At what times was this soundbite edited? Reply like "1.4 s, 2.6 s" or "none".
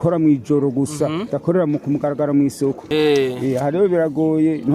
2.9 s